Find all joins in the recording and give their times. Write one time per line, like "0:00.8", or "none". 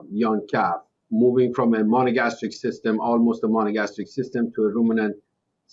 0:00.9